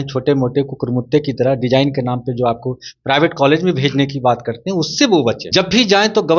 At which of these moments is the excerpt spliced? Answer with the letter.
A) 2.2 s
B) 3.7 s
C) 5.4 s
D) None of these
C